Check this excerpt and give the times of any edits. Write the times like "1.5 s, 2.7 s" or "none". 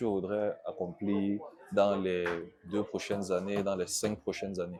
none